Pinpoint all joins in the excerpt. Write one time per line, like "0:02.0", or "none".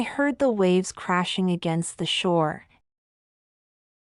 none